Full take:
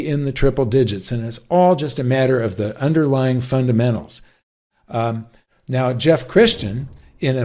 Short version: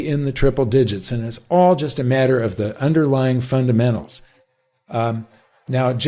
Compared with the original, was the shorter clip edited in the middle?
no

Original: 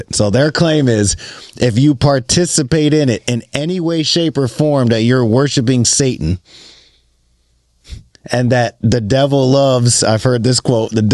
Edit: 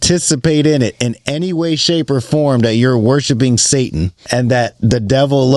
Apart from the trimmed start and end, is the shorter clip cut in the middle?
yes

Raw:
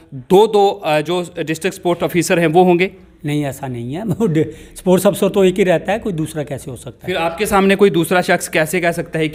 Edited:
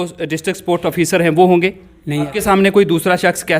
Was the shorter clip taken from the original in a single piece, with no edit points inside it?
no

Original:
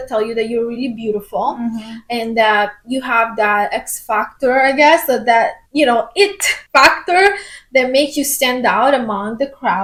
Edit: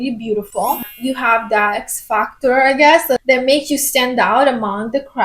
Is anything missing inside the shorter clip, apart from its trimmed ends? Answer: yes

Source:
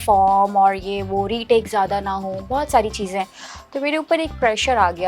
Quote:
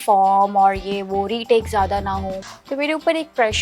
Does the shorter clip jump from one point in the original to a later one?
yes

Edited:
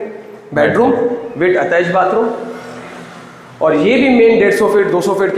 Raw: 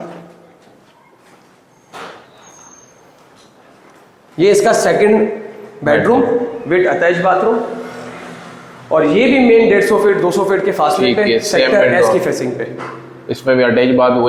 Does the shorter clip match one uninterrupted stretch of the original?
yes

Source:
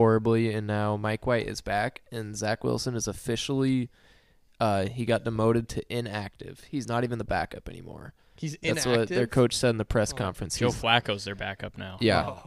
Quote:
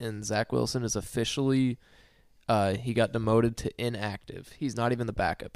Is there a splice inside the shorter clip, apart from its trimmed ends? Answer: no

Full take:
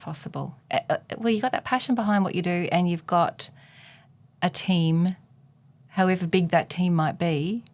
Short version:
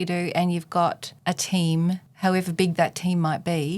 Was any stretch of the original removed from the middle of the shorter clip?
yes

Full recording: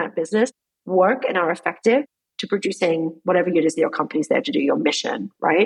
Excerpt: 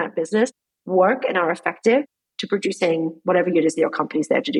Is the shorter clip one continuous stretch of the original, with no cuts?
yes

